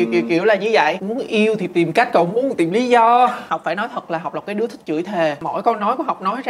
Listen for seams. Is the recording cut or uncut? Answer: cut